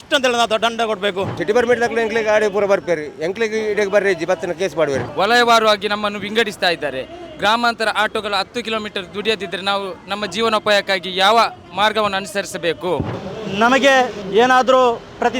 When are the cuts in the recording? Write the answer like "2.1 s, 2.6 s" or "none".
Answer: 1.3 s, 5.1 s, 13.1 s, 14.2 s